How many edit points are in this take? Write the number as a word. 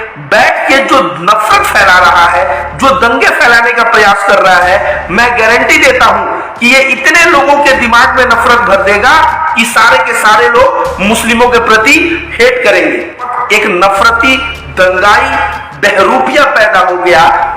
one